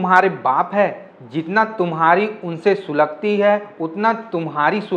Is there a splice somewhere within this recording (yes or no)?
no